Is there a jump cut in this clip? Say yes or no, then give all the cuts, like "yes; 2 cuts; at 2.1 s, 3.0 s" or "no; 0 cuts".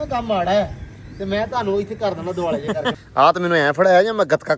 yes; 1 cut; at 3.0 s